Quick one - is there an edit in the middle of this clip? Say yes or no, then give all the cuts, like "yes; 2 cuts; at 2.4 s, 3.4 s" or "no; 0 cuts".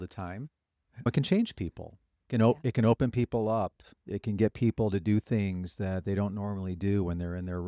no; 0 cuts